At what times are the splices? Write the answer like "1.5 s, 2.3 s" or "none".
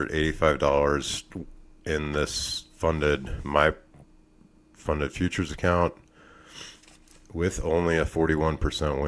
none